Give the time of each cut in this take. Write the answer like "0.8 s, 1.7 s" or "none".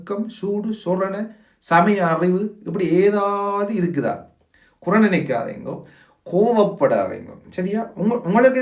none